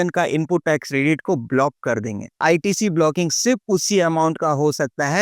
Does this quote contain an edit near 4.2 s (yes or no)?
no